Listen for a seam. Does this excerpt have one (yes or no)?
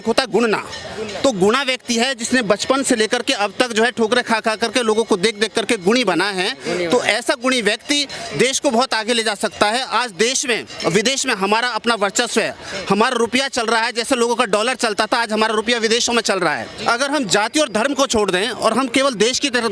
yes